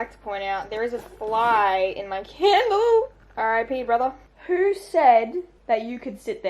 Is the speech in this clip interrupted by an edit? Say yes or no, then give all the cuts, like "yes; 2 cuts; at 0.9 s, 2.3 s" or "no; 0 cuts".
yes; 3 cuts; at 3.2 s, 4.3 s, 5.5 s